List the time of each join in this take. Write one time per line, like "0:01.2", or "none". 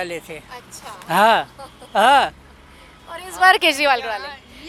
none